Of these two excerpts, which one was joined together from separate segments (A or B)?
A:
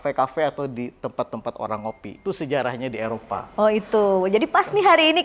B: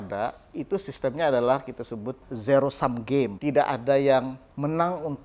B